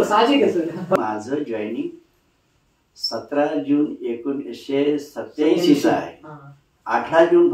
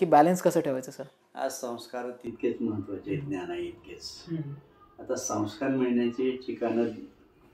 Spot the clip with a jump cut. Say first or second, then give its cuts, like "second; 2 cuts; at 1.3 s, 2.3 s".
first; 1 cut; at 1.0 s